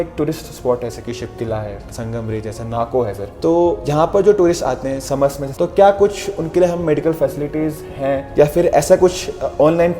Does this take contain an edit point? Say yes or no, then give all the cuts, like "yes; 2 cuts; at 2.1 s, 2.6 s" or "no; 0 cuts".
yes; 2 cuts; at 0.9 s, 5.4 s